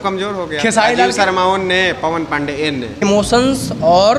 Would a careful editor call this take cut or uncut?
cut